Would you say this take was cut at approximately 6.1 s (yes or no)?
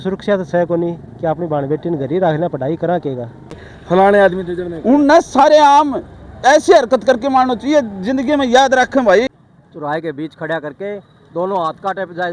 no